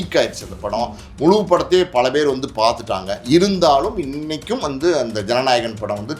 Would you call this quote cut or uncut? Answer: uncut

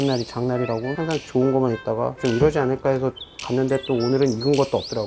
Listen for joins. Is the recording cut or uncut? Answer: uncut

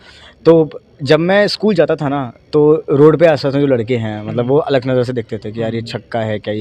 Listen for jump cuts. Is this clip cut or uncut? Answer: uncut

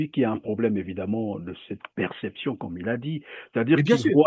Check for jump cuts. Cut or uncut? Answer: uncut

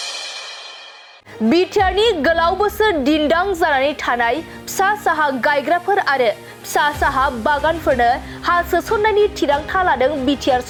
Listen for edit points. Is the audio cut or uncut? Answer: uncut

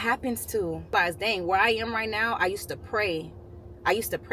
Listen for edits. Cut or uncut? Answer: cut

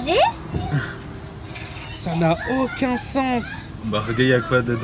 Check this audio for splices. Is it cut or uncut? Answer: uncut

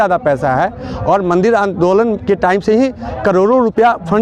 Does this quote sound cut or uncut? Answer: uncut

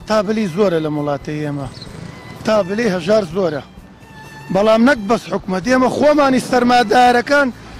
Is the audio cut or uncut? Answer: uncut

